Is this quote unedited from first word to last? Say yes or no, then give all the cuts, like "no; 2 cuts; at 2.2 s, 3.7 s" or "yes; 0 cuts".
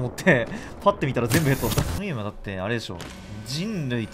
no; 1 cut; at 2.0 s